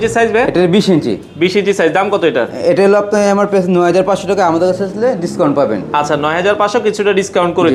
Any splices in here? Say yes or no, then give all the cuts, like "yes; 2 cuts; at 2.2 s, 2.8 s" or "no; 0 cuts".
no; 0 cuts